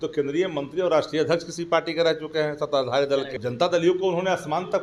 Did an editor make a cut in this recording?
yes; 1 cut; at 3.3 s

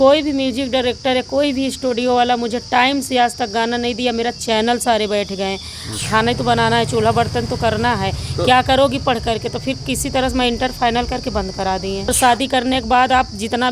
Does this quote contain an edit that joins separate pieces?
yes; 2 cuts; at 6.0 s, 12.1 s

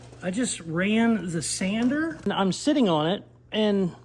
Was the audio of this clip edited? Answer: yes; 1 cut; at 2.3 s

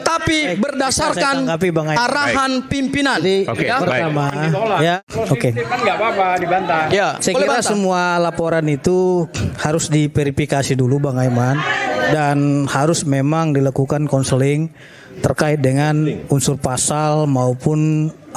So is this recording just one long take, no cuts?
no; 1 cut; at 5.0 s

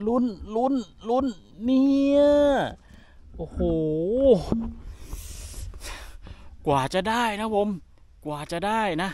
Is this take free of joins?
yes; 0 cuts

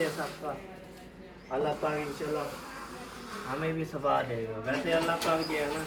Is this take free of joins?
yes; 0 cuts

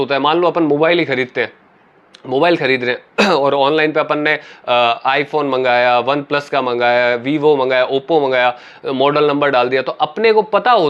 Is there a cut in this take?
no; 0 cuts

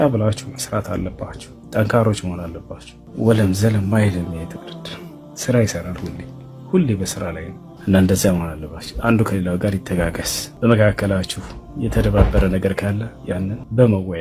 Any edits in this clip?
no; 0 cuts

